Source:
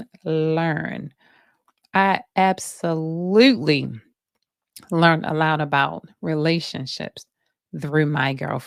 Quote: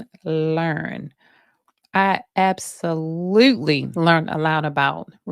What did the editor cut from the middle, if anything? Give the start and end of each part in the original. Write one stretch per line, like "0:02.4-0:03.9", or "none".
0:03.9-0:04.8